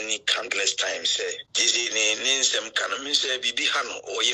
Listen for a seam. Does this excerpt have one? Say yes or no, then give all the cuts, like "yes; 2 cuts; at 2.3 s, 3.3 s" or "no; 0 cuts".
yes; 1 cut; at 1.5 s